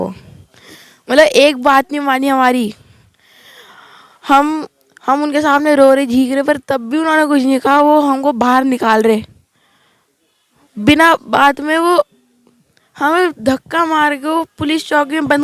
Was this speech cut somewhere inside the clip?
no; 0 cuts

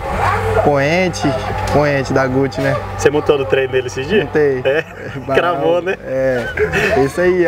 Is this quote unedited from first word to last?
yes; 0 cuts

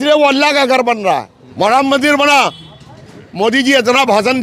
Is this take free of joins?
no; 1 cut; at 1.4 s

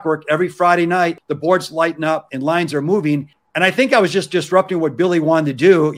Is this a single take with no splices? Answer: no; 3 cuts; at 1.2 s, 2.3 s, 3.4 s

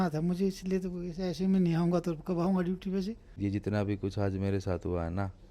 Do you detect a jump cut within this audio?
yes; 1 cut; at 3.3 s

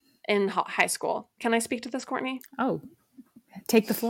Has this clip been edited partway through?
no; 0 cuts

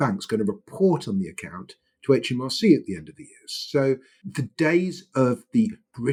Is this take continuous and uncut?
yes; 0 cuts

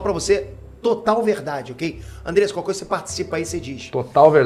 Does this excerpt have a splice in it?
no; 0 cuts

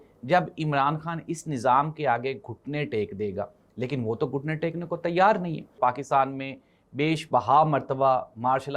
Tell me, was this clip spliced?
yes; 1 cut; at 5.7 s

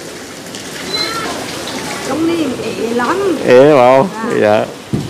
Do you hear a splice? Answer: yes; 1 cut; at 2.0 s

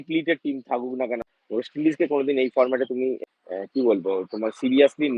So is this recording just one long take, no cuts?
no; 2 cuts; at 1.3 s, 3.2 s

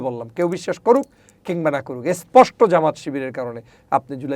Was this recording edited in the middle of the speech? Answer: no; 0 cuts

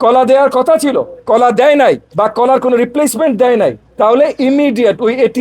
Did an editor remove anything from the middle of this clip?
yes; 3 cuts; at 1.1 s, 2.1 s, 3.8 s

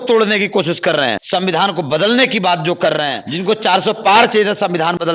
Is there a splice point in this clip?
yes; 2 cuts; at 1.2 s, 3.2 s

